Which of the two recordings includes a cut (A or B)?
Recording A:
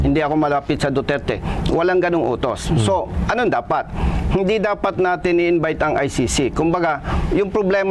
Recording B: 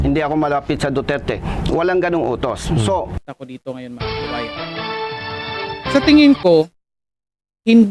B